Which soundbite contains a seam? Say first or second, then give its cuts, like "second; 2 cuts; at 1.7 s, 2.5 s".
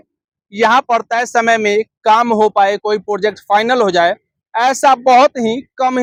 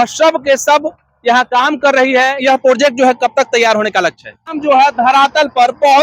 second; 2 cuts; at 2.4 s, 4.5 s